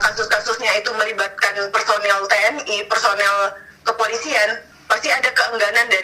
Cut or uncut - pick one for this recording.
uncut